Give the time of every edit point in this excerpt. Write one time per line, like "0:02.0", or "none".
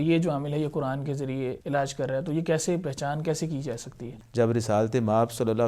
0:01.6
0:04.1